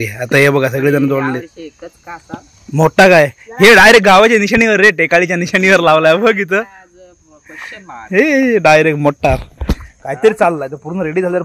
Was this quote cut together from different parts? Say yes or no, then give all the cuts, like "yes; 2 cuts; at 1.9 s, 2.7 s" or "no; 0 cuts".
no; 0 cuts